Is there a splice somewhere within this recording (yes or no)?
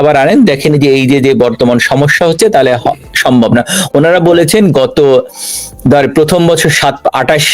no